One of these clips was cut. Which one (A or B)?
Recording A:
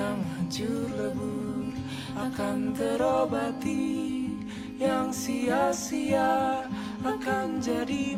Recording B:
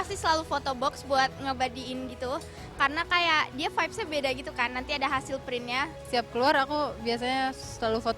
B